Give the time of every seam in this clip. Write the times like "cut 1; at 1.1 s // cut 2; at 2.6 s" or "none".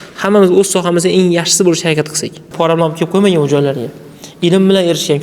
cut 1; at 2.5 s